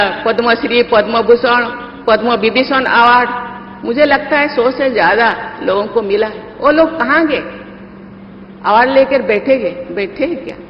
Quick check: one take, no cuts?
yes; 0 cuts

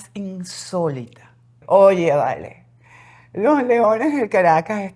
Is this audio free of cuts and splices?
no; 1 cut; at 1.6 s

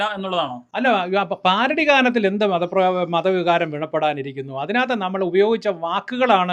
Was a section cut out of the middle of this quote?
no; 0 cuts

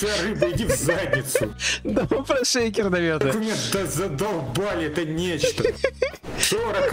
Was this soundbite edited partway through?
no; 0 cuts

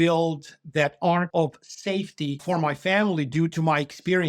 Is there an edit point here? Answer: yes; 2 cuts; at 1.3 s, 2.4 s

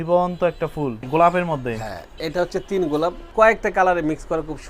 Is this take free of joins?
no; 2 cuts; at 1.0 s, 3.2 s

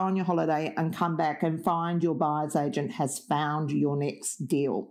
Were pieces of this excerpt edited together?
no; 0 cuts

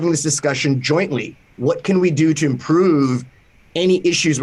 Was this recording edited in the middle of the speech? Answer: no; 0 cuts

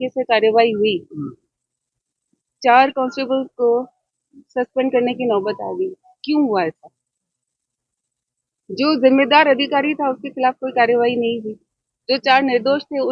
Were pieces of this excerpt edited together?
no; 0 cuts

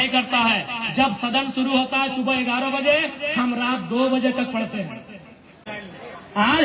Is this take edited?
yes; 1 cut; at 5.7 s

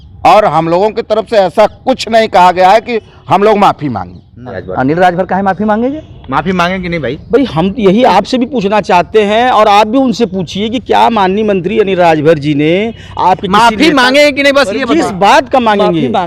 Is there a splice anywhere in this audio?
yes; 1 cut; at 4.6 s

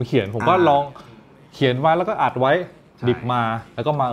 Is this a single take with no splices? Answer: yes; 0 cuts

